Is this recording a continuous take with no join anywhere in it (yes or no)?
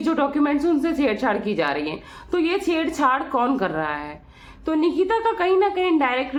yes